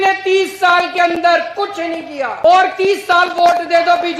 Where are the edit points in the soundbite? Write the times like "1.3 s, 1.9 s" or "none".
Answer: 2.4 s